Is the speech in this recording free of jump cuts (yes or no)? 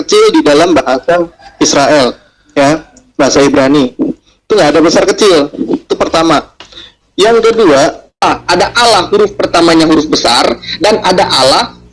no